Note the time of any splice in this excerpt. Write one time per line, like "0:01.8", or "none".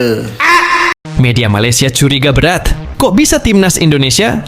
0:00.9

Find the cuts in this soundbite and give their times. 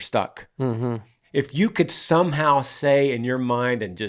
0:01.2

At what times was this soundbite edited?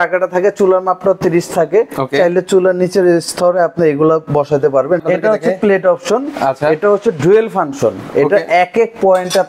0:05.0

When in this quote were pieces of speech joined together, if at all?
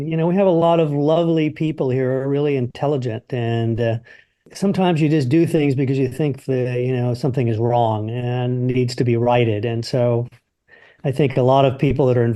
0:04.4

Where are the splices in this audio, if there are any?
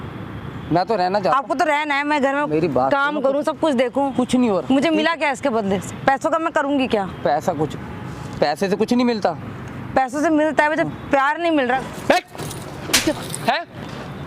0:11.8

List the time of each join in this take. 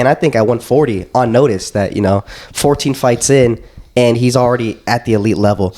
none

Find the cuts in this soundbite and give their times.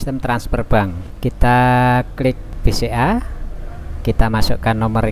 0:01.1
0:02.5

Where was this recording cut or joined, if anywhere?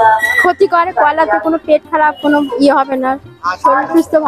none

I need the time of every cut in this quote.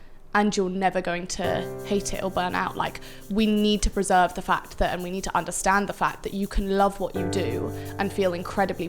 0:01.7

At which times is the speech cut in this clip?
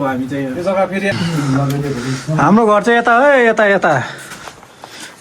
0:01.1

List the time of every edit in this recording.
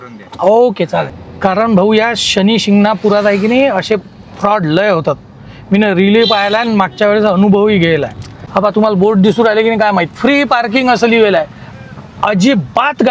0:01.2
0:08.5

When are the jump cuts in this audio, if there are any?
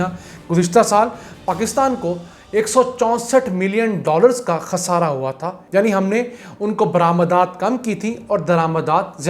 0:05.6

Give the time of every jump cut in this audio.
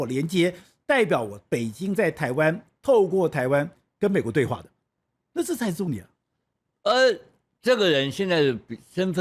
none

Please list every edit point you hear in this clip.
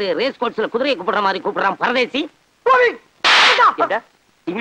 0:02.7

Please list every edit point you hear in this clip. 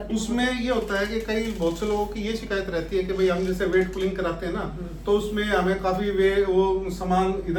none

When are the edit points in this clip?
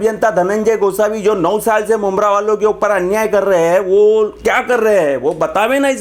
none

